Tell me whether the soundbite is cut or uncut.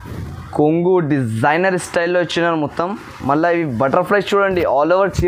uncut